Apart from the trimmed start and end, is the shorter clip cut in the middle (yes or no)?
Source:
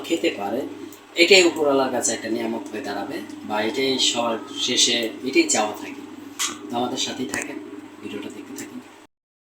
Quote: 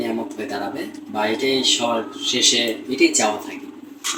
no